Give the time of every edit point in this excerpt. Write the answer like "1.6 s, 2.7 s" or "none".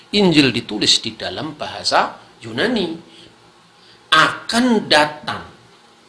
3.2 s